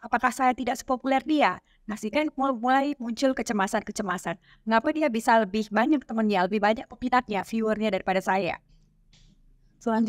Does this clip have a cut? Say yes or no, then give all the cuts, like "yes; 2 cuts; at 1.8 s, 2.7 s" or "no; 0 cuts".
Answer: no; 0 cuts